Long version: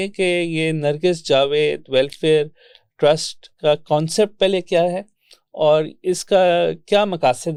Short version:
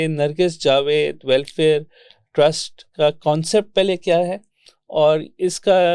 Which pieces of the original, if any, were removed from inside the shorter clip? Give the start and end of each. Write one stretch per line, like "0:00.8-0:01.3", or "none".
none